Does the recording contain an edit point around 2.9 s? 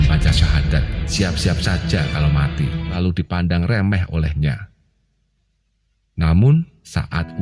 yes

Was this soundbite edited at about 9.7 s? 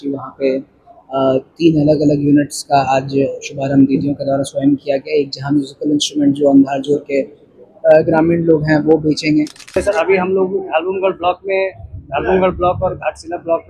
yes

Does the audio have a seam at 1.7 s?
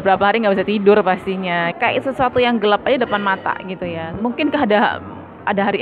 yes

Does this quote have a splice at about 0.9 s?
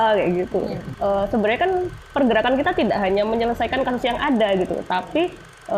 yes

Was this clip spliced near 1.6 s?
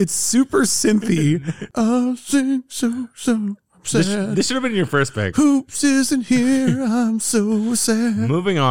yes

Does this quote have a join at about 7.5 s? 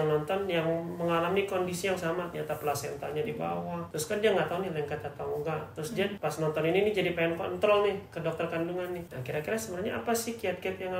no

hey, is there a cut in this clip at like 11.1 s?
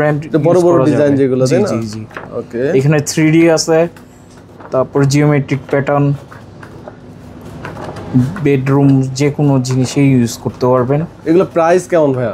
no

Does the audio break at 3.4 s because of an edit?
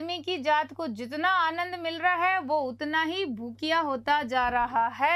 no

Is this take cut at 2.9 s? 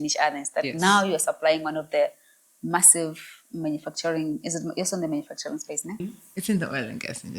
no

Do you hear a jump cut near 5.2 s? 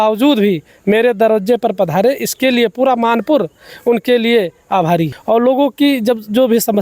yes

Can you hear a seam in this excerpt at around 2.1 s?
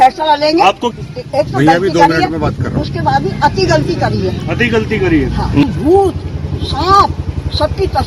no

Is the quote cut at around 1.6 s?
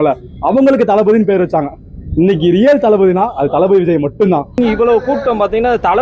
no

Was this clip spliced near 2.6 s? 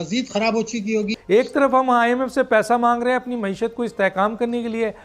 no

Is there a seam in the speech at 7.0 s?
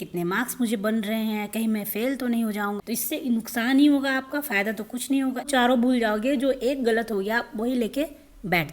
no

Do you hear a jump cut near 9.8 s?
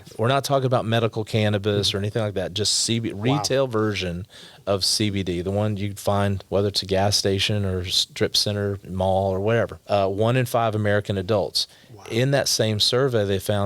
yes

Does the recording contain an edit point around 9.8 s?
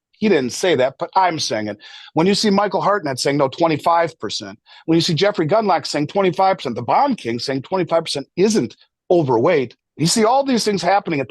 yes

